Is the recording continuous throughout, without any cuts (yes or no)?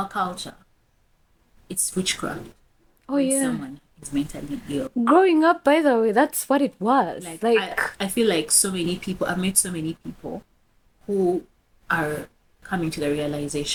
yes